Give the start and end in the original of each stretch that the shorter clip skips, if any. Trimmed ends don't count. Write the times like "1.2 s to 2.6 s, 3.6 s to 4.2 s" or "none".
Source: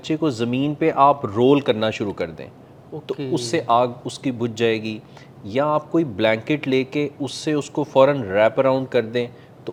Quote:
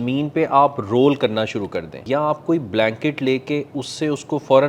2.4 s to 5.4 s

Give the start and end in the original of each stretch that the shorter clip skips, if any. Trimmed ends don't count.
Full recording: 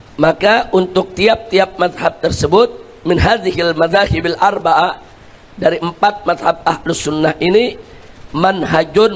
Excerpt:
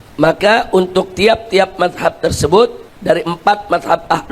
2.9 s to 5.4 s

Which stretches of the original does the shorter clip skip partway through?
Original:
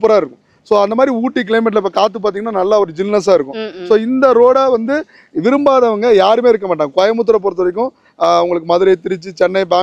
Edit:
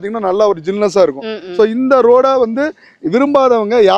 none

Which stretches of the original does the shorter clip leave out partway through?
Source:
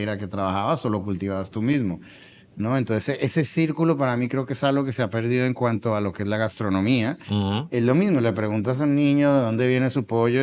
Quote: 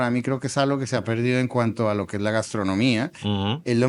none

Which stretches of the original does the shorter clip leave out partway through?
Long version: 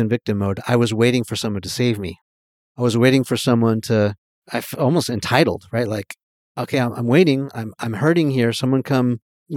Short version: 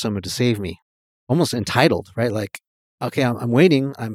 2.7 s to 4.9 s

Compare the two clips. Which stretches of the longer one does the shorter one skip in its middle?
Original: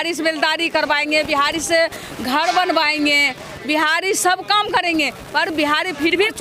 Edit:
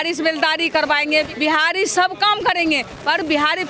1.3 s to 3.6 s

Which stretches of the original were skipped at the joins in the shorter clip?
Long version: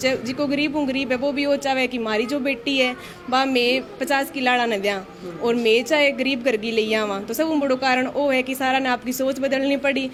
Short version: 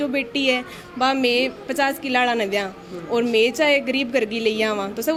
none

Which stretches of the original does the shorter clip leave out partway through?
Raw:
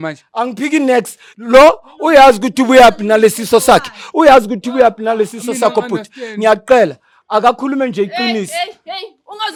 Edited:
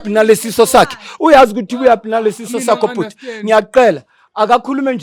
none

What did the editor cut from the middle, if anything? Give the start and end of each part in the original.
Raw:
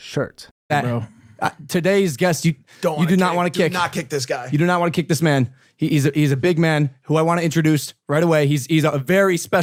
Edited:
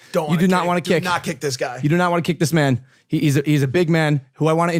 none

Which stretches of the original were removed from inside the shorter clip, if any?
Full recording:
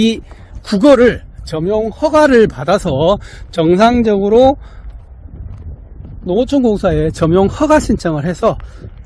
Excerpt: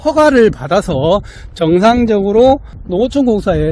4.7 s to 6.1 s

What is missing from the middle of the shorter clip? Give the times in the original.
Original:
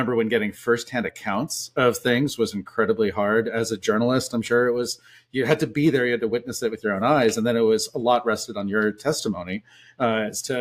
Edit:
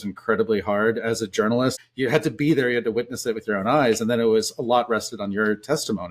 4.3 s to 5.1 s

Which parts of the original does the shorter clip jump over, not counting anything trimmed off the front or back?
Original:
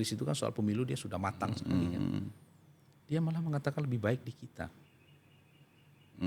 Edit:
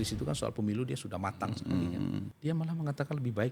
2.3 s to 3.0 s

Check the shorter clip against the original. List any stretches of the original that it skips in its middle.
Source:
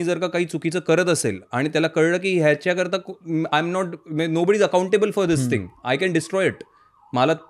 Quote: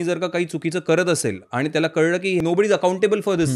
2.4 s to 4.3 s

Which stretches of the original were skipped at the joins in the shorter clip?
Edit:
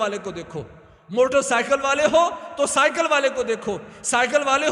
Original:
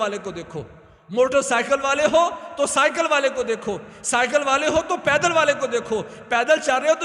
none

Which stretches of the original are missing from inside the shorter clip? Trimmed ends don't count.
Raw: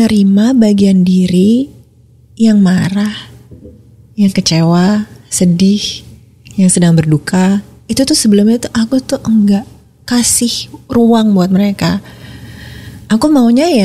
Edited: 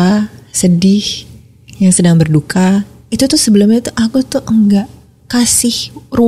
none

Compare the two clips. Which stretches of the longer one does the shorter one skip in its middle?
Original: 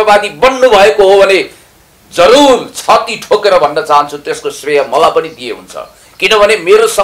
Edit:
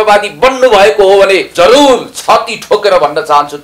1.5 s to 2.1 s

